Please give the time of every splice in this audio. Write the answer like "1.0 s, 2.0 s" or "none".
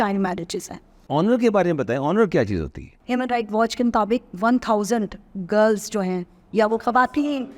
0.9 s, 2.9 s